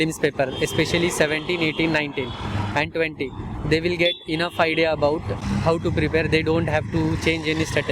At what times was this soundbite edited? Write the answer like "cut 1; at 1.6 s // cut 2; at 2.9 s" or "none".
cut 1; at 5.4 s